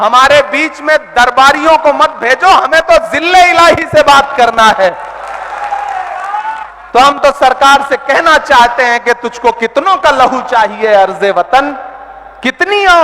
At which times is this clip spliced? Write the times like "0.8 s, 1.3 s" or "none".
6.7 s